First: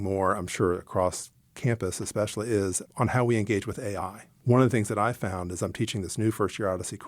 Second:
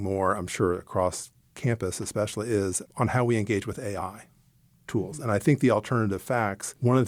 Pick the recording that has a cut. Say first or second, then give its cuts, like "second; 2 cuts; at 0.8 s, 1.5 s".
first; 1 cut; at 4.3 s